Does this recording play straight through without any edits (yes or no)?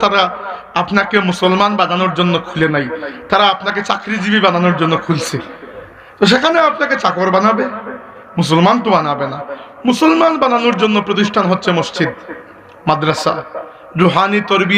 yes